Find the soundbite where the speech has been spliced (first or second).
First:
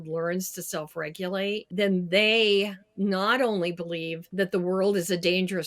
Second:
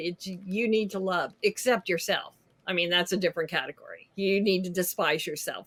first